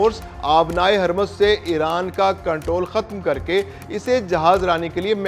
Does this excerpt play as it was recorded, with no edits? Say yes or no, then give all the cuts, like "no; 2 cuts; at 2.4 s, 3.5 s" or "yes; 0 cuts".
yes; 0 cuts